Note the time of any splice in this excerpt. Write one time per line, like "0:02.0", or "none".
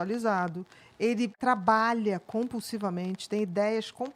0:01.4